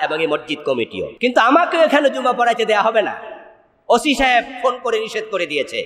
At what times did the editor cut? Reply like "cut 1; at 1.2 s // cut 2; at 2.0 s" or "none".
cut 1; at 1.1 s